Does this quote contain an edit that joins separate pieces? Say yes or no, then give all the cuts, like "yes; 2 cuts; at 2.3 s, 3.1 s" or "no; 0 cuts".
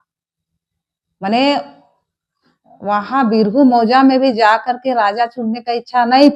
no; 0 cuts